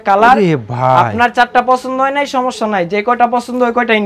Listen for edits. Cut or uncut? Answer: uncut